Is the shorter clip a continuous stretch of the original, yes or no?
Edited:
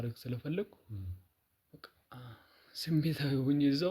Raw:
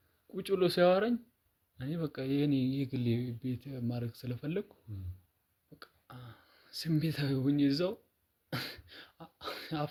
yes